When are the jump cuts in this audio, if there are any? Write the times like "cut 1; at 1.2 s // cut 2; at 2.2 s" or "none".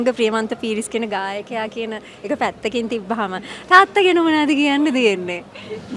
none